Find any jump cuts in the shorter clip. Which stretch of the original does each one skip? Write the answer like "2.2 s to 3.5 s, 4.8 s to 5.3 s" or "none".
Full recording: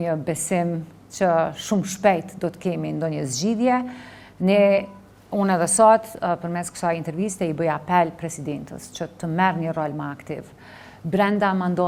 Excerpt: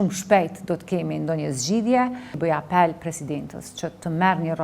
4.1 s to 7.5 s